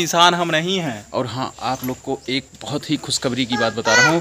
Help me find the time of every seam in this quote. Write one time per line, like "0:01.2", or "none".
0:01.0